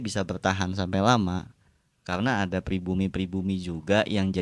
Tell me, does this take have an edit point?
no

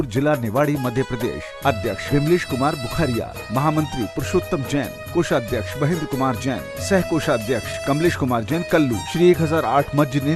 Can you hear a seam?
no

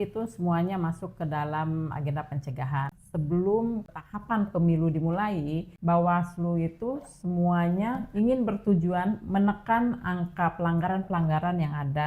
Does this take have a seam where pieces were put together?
yes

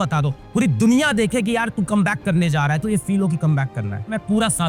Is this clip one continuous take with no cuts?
yes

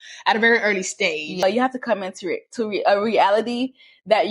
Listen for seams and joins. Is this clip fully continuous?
no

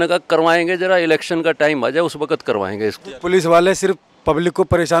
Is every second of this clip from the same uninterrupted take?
no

